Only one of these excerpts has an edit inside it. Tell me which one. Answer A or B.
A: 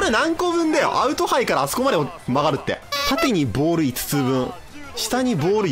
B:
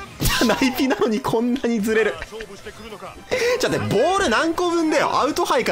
A